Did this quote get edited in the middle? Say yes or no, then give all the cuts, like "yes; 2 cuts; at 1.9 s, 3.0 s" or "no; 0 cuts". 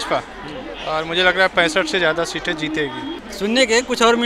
yes; 1 cut; at 3.1 s